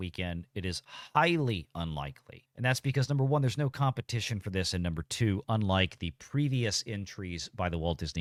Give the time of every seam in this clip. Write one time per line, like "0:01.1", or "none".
none